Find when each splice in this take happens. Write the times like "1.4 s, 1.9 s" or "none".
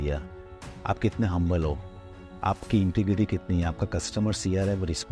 none